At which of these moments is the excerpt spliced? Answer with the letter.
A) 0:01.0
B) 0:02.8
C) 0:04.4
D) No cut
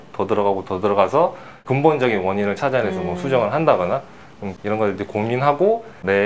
C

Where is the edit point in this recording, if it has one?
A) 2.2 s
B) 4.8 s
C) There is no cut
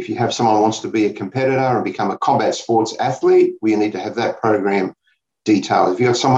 A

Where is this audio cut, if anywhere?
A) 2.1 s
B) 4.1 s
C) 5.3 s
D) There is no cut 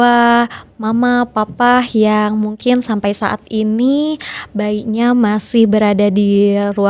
D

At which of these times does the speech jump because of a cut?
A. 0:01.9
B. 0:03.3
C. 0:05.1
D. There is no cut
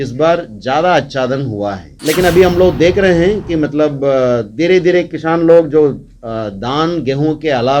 A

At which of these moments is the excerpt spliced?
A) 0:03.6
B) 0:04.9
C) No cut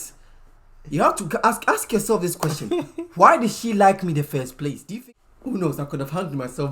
B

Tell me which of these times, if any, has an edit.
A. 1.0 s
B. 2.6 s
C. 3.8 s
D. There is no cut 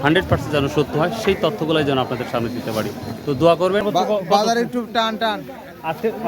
C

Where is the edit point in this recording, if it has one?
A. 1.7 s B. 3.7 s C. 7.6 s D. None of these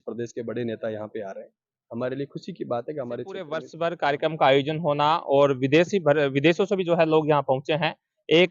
B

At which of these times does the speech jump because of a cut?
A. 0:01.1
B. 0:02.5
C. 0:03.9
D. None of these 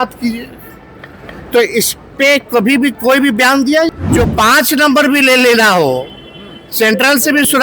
C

